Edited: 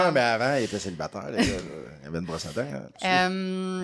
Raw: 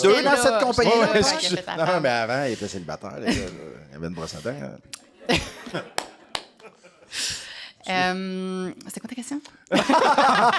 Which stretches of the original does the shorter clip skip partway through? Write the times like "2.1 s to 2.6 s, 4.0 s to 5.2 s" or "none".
4.8 s to 7.8 s